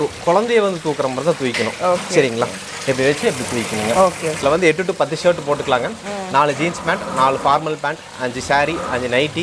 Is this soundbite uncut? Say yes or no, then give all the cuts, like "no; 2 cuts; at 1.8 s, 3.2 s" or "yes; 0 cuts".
no; 1 cut; at 4.4 s